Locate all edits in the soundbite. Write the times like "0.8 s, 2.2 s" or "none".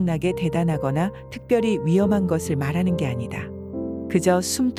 none

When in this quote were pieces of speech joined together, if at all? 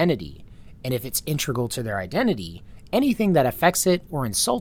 none

